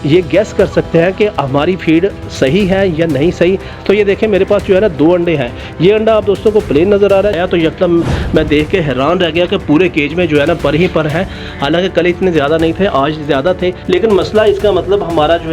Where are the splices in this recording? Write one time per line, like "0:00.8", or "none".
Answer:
0:03.7
0:07.3